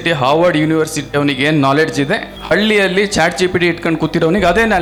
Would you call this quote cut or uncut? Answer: uncut